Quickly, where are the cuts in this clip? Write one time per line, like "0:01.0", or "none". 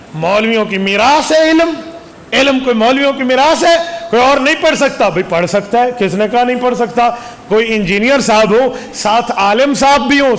none